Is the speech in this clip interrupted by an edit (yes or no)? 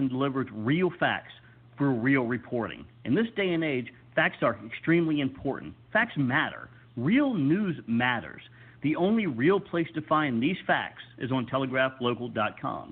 no